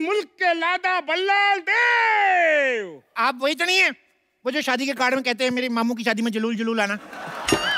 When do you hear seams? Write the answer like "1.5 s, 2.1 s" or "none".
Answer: none